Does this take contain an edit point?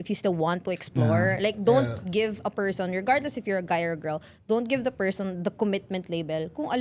no; 0 cuts

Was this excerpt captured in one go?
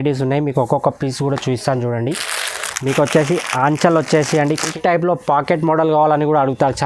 no; 1 cut; at 4.7 s

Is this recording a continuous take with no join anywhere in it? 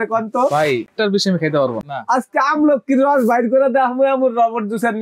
no; 2 cuts; at 0.9 s, 1.8 s

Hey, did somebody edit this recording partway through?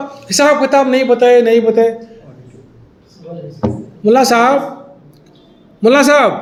no; 0 cuts

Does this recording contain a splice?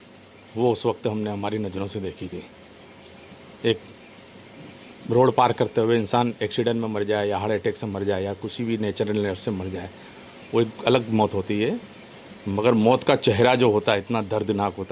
no; 0 cuts

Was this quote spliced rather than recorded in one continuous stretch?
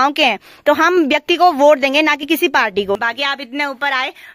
yes; 1 cut; at 3.0 s

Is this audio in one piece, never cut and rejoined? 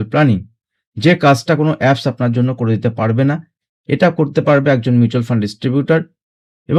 yes; 0 cuts

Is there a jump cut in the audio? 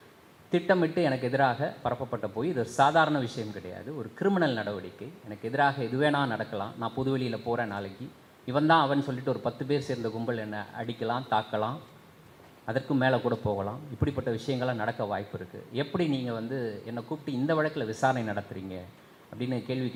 no; 0 cuts

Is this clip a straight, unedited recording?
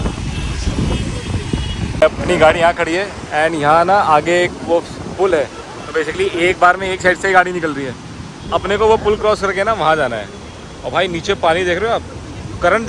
no; 1 cut; at 2.0 s

